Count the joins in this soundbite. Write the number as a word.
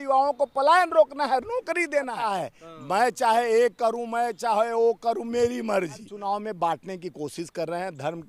two